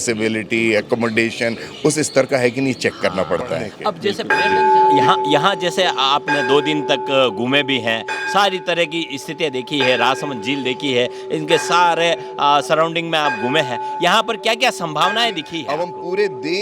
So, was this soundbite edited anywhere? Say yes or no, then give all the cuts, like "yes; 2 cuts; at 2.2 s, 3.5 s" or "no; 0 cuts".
yes; 2 cuts; at 4.1 s, 15.6 s